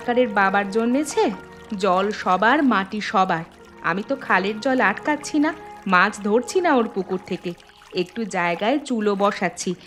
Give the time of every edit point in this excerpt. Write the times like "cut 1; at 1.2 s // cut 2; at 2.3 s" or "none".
none